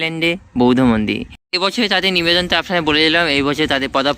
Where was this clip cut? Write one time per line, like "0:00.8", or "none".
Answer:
0:01.5